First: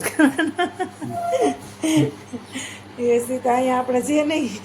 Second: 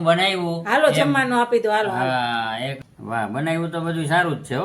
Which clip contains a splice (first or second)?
second